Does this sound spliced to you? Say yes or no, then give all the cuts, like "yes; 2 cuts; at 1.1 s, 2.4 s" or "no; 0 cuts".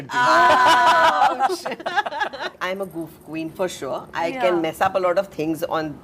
yes; 1 cut; at 2.5 s